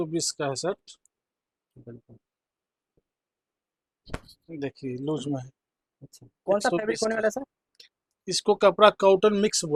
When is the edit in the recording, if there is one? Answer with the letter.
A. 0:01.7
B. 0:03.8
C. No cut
C